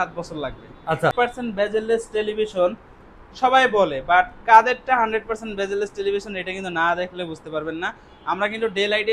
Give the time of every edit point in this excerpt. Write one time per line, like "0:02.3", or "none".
0:01.1

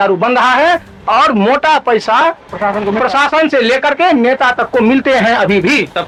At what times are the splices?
none

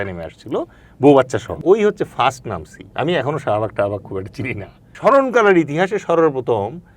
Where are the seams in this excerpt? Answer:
0:01.6
0:04.9

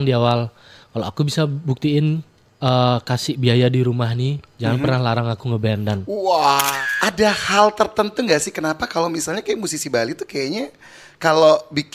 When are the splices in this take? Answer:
0:06.7

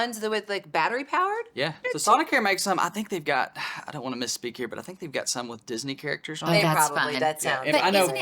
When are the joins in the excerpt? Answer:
0:01.8

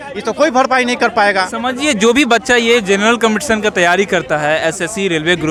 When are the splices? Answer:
none

